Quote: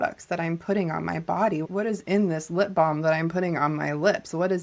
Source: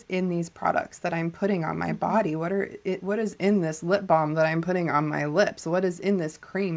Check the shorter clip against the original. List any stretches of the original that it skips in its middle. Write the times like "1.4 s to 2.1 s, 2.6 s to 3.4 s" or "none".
2.4 s to 3.0 s